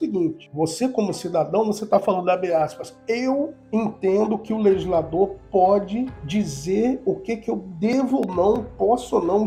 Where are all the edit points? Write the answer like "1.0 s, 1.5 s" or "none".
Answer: none